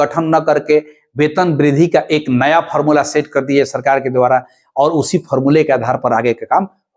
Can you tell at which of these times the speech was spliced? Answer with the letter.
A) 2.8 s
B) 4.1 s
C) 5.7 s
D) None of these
D